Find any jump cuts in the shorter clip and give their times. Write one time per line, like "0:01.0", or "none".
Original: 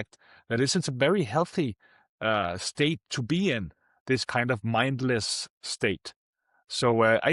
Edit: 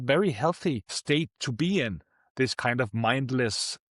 0:00.9